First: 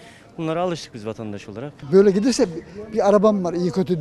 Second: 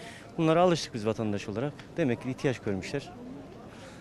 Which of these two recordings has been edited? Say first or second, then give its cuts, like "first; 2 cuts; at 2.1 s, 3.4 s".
first; 1 cut; at 1.8 s